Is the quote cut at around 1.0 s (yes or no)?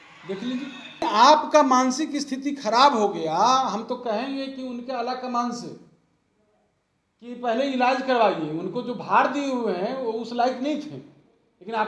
yes